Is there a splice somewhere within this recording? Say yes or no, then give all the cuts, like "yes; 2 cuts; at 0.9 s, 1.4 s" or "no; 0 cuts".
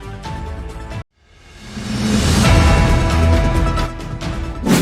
yes; 1 cut; at 0.9 s